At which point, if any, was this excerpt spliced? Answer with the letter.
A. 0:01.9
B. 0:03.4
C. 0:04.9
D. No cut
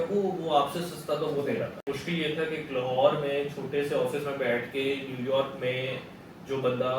A